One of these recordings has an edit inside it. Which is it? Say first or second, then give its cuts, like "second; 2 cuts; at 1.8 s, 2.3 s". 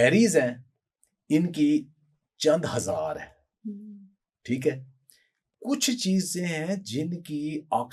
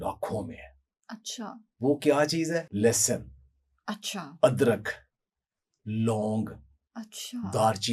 second; 1 cut; at 2.7 s